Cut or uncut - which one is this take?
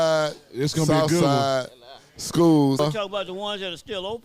cut